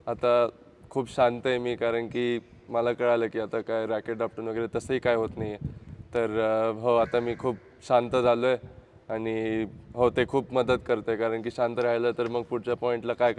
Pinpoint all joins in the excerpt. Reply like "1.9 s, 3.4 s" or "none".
none